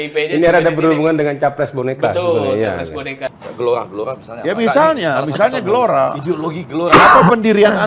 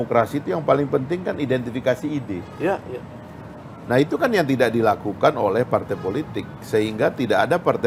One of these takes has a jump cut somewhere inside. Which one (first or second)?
first